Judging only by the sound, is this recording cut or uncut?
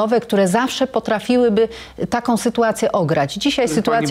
uncut